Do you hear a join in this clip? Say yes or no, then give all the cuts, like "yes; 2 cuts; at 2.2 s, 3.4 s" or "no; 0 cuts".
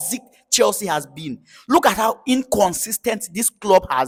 no; 0 cuts